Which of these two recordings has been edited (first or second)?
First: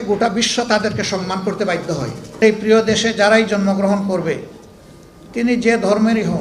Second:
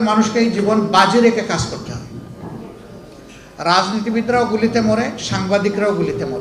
first